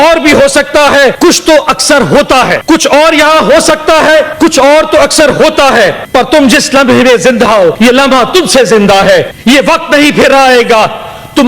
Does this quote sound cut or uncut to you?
cut